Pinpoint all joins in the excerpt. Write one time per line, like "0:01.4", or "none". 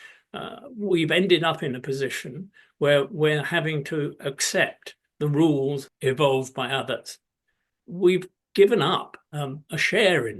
0:05.9